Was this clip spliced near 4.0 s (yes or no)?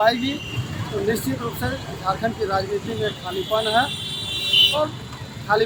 no